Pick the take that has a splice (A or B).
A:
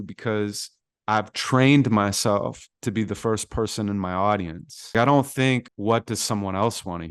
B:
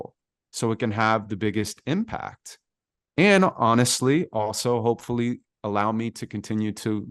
A